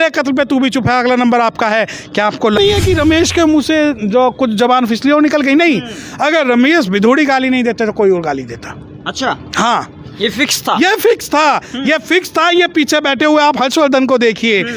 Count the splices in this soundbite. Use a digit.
1